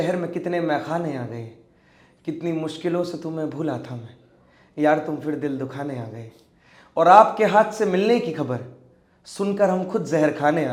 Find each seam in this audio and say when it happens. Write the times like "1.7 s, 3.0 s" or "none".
none